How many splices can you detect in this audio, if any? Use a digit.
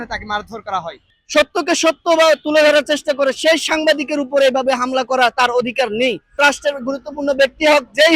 2